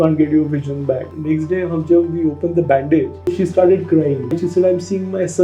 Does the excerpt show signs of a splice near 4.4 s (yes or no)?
yes